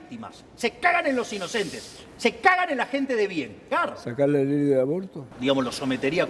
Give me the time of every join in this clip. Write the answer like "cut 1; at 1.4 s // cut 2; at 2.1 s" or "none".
cut 1; at 3.6 s // cut 2; at 5.2 s